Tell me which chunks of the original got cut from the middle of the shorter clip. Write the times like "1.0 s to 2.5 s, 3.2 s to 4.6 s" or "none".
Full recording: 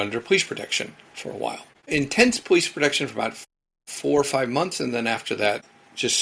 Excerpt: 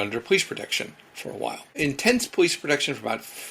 1.7 s to 1.8 s